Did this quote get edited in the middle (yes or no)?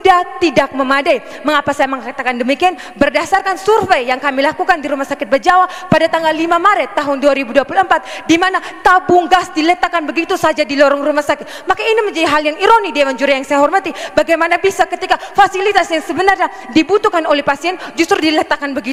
no